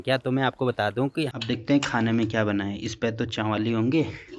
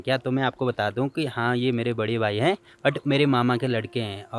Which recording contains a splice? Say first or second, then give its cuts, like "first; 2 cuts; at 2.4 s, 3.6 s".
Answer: first; 1 cut; at 1.3 s